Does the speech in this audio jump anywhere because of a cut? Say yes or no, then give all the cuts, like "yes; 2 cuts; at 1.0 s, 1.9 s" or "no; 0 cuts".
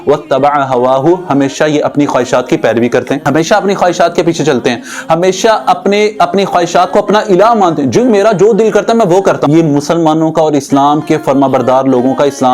yes; 2 cuts; at 3.2 s, 9.4 s